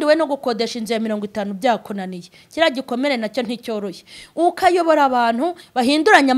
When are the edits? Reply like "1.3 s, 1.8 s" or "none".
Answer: none